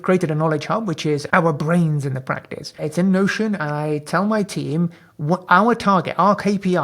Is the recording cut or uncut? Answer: cut